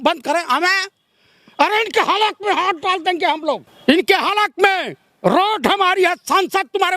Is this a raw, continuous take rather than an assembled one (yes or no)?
no